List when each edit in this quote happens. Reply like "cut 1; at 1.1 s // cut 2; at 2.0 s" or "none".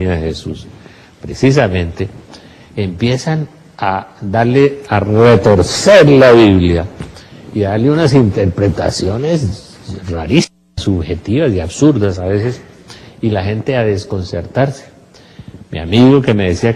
cut 1; at 11.7 s